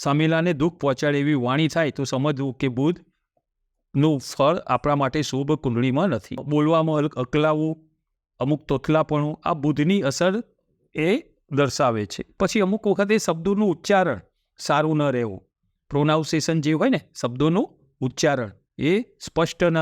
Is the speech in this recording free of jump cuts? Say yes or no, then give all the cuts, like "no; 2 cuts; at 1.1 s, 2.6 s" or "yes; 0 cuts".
no; 2 cuts; at 6.4 s, 12.2 s